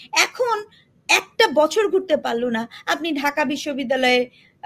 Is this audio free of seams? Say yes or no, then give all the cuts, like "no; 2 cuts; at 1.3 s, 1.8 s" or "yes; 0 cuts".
yes; 0 cuts